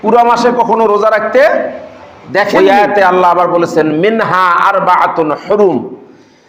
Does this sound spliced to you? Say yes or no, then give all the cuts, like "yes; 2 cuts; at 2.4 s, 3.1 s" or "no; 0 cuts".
yes; 1 cut; at 2.5 s